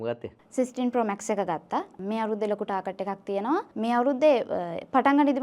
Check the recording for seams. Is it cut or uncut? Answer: uncut